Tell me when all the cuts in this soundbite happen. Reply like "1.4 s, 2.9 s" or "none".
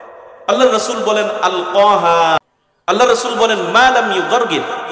2.4 s

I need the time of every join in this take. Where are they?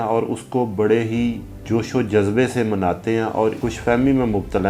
1.5 s, 3.6 s

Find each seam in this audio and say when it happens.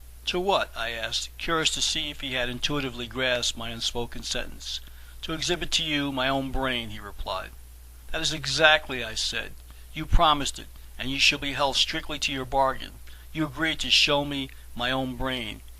9.1 s

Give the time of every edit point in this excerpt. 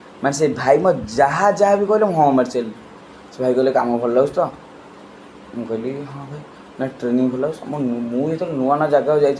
none

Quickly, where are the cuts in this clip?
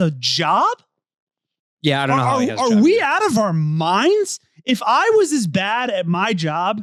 none

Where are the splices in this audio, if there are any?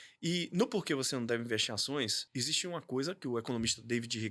2.2 s

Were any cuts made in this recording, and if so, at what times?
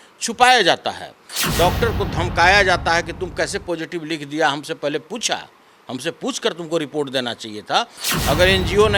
1.3 s, 8.0 s

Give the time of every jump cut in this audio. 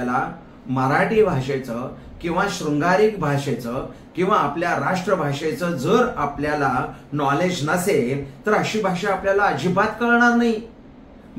none

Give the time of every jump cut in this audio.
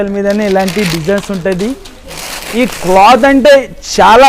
1.9 s

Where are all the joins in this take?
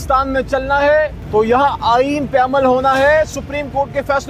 1.2 s

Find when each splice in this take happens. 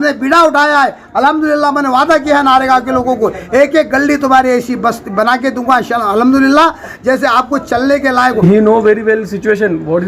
8.4 s

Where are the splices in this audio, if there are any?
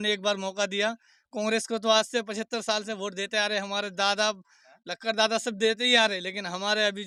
none

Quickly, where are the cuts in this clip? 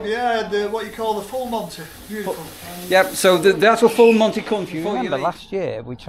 4.8 s

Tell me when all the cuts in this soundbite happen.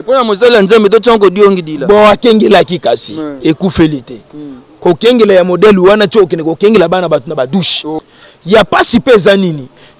7.9 s

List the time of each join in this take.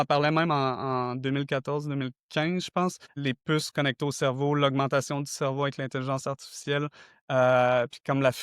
3.1 s

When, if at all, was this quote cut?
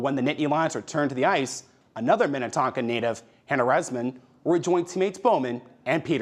none

